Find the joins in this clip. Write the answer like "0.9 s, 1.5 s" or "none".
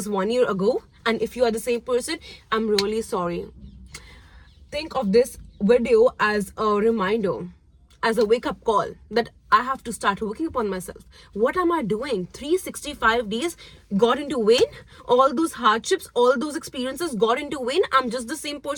none